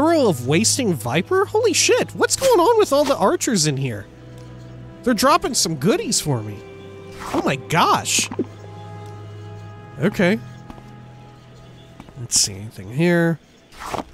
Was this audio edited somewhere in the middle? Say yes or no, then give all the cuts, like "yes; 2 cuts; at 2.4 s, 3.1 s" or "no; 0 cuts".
yes; 1 cut; at 12.4 s